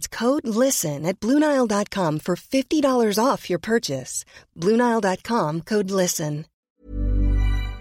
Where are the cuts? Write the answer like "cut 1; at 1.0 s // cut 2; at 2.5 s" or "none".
cut 1; at 6.5 s